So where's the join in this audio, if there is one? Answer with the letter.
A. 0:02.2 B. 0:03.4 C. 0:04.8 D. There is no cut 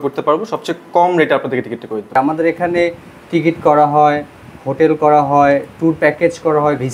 A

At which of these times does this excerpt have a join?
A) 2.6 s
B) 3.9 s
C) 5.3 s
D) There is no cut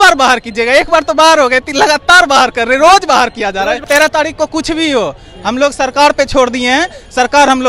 B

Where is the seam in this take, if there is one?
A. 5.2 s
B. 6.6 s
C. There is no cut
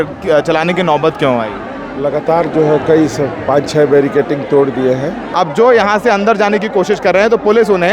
A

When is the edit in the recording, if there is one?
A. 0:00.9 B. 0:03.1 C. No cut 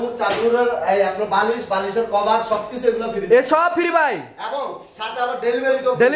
C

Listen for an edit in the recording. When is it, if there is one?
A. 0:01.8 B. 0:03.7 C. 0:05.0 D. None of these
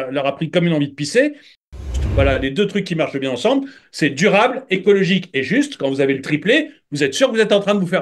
A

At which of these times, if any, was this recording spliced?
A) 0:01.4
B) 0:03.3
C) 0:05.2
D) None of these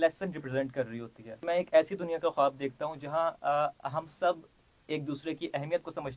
A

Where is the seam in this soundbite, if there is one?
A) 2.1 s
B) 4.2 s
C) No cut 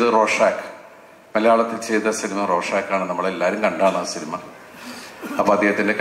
C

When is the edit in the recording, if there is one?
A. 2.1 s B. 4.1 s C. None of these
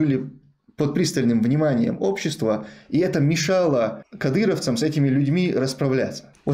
B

